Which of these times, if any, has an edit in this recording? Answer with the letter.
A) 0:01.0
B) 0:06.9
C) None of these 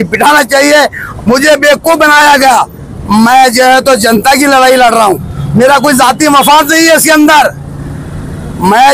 A